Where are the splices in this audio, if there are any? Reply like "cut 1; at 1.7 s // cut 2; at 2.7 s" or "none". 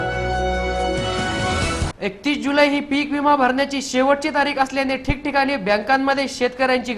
cut 1; at 1.9 s